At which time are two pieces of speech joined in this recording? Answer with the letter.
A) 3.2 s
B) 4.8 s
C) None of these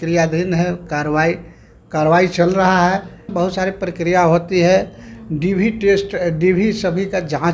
A